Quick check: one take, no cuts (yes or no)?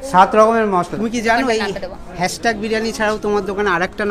no